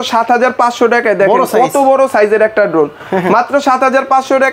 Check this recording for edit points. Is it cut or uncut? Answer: uncut